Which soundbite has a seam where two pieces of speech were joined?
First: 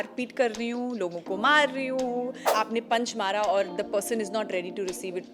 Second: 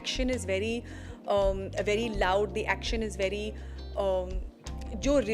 first; 1 cut; at 2.4 s

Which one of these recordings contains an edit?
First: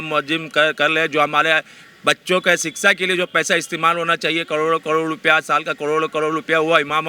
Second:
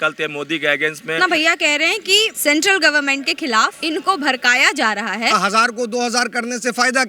second; 4 cuts; at 1.2 s, 2.3 s, 3.8 s, 5.4 s

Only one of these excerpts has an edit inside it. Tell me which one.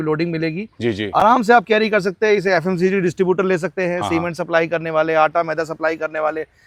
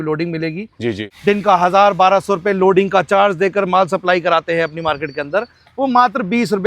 second; 1 cut; at 1.0 s

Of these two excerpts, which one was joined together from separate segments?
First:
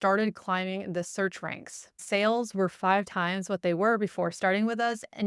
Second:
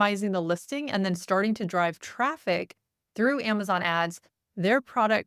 first; 1 cut; at 2.0 s

